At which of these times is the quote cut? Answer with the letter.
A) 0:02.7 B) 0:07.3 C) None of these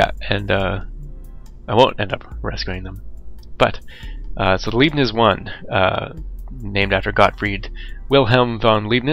C